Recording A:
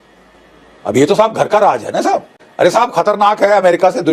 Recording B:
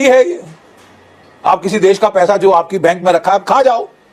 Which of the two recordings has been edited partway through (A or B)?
A